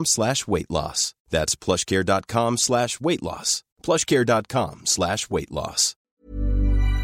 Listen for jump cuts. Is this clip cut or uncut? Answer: cut